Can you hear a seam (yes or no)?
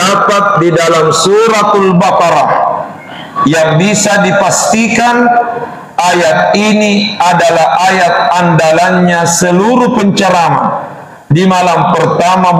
no